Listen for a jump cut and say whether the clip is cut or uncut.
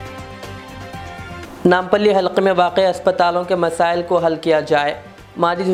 uncut